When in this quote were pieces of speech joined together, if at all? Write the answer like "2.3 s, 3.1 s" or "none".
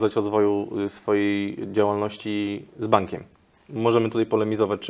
none